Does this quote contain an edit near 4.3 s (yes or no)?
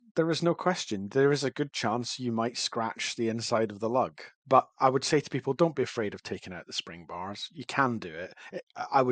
yes